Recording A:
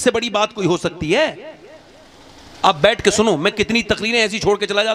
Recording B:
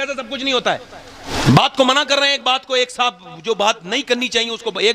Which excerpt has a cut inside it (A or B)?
B